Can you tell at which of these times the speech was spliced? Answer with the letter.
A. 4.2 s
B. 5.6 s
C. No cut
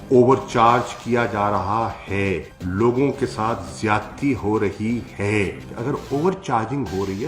B